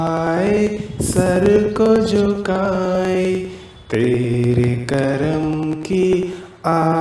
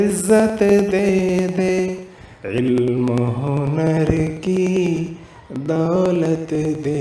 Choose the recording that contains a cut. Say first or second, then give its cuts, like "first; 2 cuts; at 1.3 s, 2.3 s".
first; 1 cut; at 2.2 s